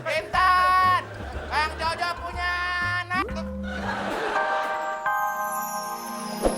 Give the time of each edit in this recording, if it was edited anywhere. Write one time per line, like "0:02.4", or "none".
0:04.5

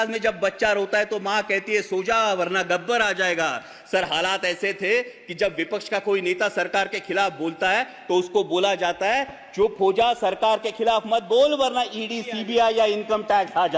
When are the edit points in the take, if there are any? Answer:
none

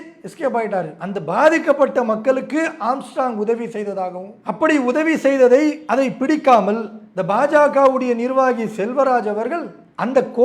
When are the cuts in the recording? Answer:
0:01.0
0:05.8

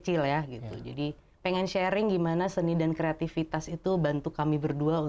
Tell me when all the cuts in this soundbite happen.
0:01.3

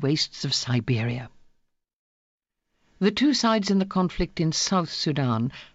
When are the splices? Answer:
none

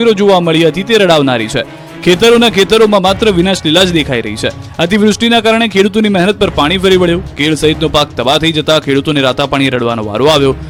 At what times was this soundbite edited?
none

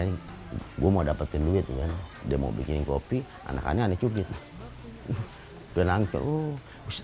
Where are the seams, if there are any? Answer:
0:02.1

